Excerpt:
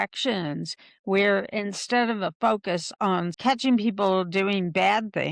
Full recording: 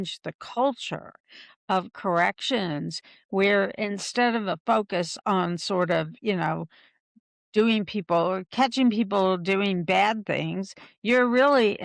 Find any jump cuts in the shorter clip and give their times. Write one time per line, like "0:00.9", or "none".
0:03.3